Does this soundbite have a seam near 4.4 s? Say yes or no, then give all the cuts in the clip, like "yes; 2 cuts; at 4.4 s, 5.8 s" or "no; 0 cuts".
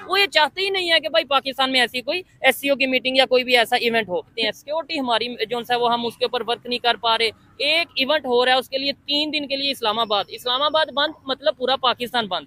yes; 1 cut; at 4.4 s